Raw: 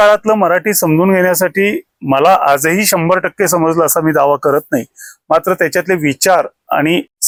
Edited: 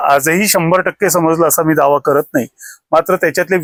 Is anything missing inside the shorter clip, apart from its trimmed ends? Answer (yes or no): no